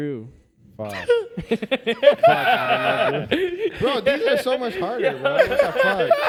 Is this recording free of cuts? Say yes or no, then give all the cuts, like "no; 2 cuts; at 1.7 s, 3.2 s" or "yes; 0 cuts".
yes; 0 cuts